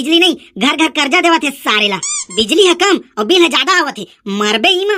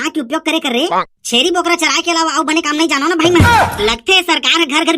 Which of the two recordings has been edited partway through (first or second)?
second